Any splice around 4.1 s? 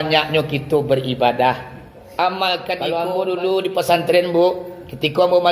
no; 1 cut; at 2.8 s

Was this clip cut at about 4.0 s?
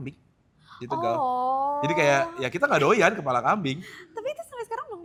no; 0 cuts

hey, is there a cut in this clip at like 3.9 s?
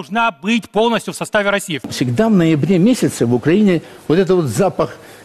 no; 1 cut; at 1.9 s

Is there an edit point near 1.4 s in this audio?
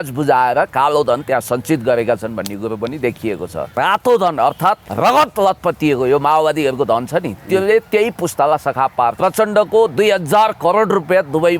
no; 3 cuts; at 3.7 s, 4.9 s, 9.2 s

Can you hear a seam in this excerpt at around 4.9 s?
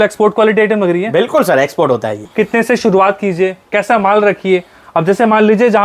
no; 1 cut; at 2.2 s

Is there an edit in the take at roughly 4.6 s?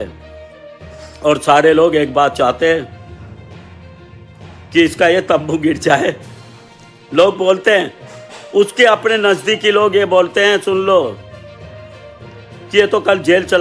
yes; 2 cuts; at 2.9 s, 4.6 s

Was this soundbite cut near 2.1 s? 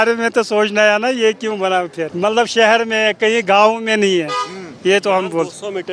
yes; 1 cut; at 2.1 s

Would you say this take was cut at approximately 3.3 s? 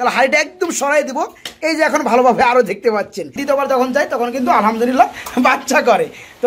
yes; 1 cut; at 3.3 s

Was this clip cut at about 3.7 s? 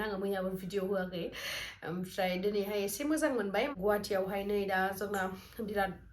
yes; 1 cut; at 3.7 s

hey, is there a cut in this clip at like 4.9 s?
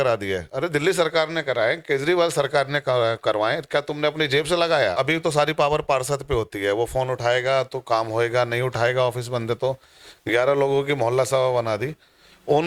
yes; 1 cut; at 4.9 s

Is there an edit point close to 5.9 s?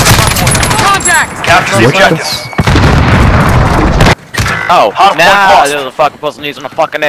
no; 1 cut; at 4.1 s

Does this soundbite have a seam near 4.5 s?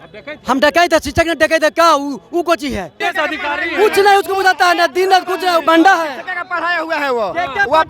no; 1 cut; at 3.0 s

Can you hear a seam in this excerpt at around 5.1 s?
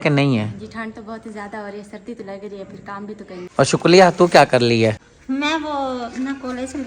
yes; 2 cuts; at 3.4 s, 5.1 s

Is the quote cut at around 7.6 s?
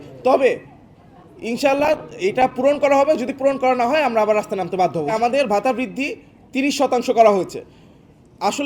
no; 1 cut; at 5.2 s

